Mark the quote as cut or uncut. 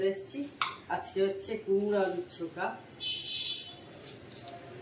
uncut